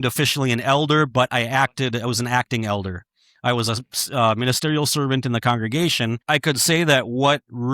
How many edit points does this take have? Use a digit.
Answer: 1